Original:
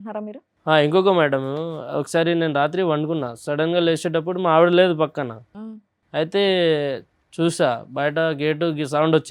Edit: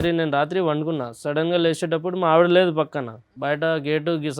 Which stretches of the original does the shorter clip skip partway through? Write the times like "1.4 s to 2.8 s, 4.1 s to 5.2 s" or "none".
5.5 s to 7.9 s

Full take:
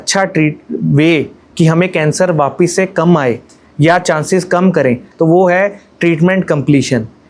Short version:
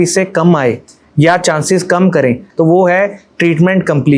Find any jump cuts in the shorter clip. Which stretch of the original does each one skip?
none

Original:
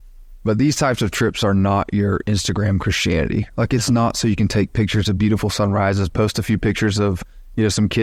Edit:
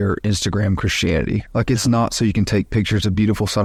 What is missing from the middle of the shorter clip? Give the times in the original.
none

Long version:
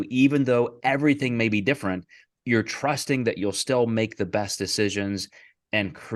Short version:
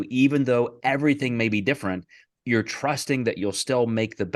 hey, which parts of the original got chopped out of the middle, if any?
none

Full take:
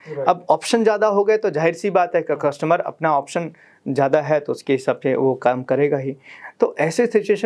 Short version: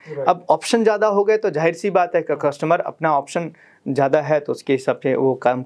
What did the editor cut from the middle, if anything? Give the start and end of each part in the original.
none

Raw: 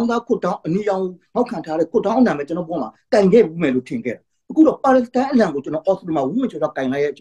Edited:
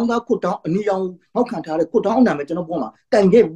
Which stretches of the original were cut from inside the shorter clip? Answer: none

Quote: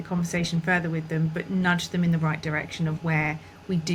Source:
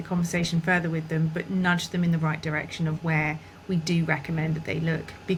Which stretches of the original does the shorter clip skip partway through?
none

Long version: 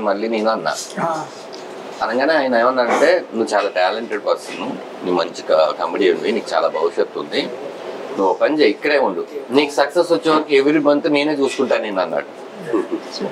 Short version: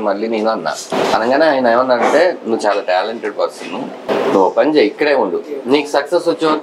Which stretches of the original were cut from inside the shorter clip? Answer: 0.8 s to 1.7 s, 4.9 s to 7.8 s

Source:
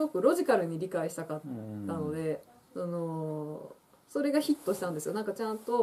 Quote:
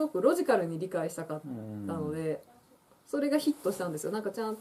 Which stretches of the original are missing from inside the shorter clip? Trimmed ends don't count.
2.6 s to 3.6 s

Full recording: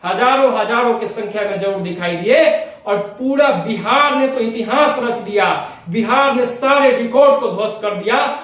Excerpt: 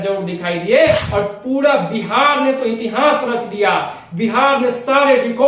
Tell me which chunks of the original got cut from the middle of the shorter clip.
2.6 s to 2.8 s

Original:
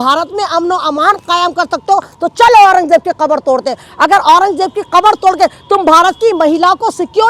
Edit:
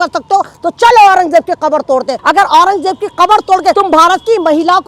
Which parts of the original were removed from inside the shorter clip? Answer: 3.7 s to 3.9 s, 5.5 s to 5.7 s

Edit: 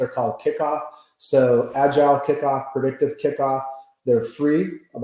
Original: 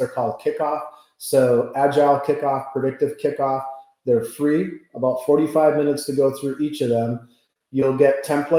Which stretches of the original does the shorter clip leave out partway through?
none

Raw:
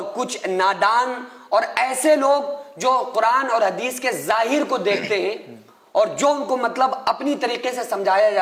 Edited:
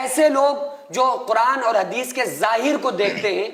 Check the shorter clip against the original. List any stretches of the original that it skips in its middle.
none

